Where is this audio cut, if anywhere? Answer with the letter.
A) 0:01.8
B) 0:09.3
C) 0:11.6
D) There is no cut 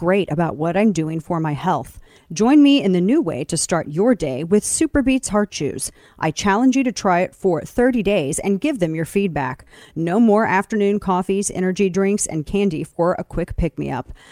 D